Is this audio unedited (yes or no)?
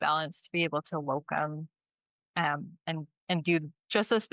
yes